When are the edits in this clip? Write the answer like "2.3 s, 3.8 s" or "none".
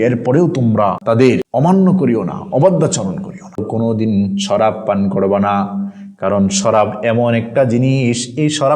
1.1 s, 3.6 s